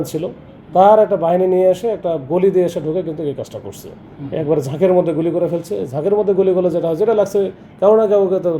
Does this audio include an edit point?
no; 0 cuts

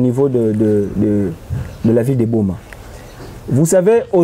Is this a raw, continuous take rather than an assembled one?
yes; 0 cuts

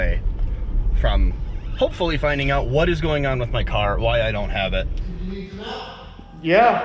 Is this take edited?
yes; 1 cut; at 5.0 s

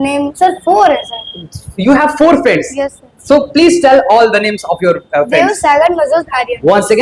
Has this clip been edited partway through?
no; 0 cuts

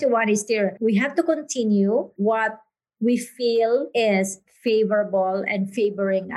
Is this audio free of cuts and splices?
no; 3 cuts; at 0.8 s, 2.1 s, 3.9 s

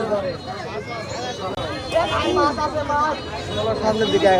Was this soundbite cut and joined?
no; 0 cuts

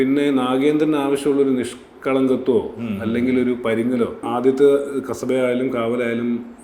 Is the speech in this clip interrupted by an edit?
yes; 1 cut; at 4.3 s

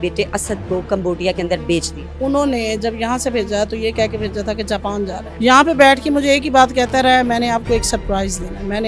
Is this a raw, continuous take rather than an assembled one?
no; 2 cuts; at 2.0 s, 5.2 s

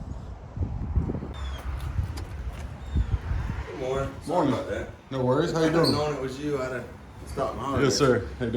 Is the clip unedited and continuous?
no; 1 cut; at 1.3 s

